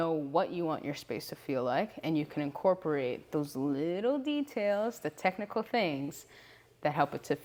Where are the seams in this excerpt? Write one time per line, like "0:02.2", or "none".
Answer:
none